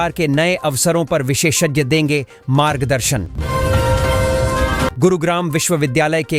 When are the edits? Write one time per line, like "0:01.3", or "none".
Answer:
0:03.4
0:04.9

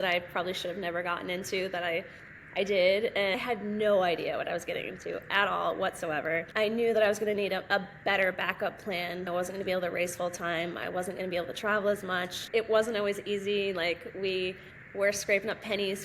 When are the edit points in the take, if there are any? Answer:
0:03.4
0:06.5
0:09.3
0:12.4

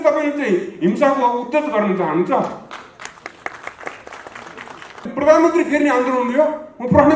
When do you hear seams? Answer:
0:05.1

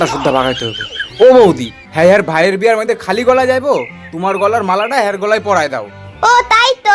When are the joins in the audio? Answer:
none

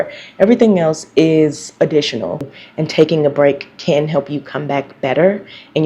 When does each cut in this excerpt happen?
0:02.4

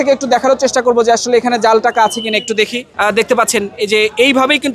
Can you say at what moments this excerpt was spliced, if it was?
0:02.8

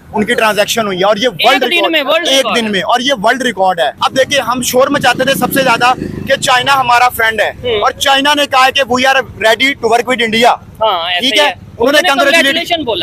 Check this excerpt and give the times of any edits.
0:04.0

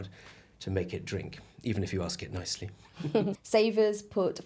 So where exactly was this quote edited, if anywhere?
0:03.4

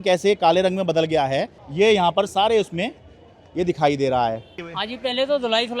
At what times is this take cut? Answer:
0:01.6
0:04.6

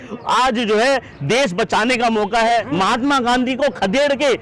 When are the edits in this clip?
0:02.7

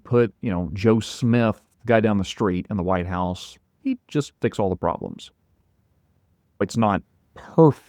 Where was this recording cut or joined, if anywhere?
0:06.6

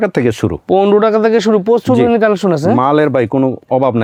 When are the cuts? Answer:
none

